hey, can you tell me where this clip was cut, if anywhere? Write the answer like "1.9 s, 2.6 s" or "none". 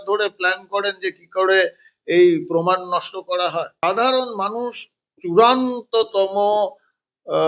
3.8 s

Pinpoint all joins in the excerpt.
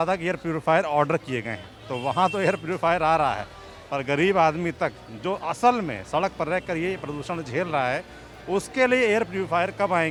none

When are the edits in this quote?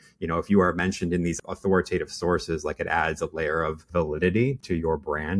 1.4 s, 4.6 s

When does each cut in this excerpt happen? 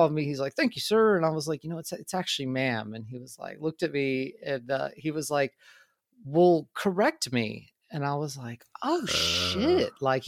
none

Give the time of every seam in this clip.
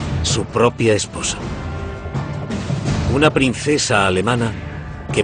1.3 s

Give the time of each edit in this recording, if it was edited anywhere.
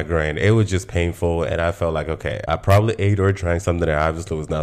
2.4 s

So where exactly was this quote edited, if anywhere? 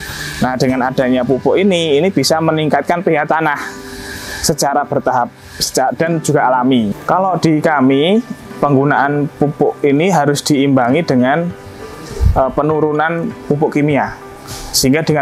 7.0 s

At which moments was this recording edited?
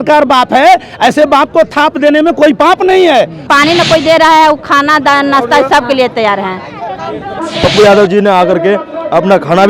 3.4 s, 7.4 s

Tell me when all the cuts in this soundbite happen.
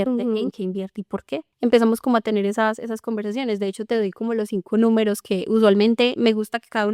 1.5 s

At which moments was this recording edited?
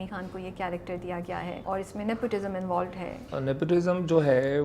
1.6 s, 3.3 s

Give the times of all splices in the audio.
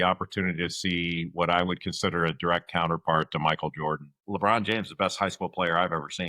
4.1 s

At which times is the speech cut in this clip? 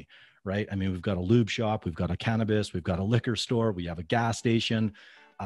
none

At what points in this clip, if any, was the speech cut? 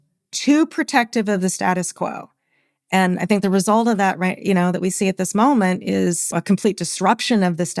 none

